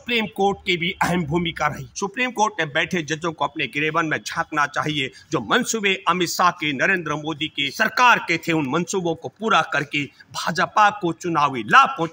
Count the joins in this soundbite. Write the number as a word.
two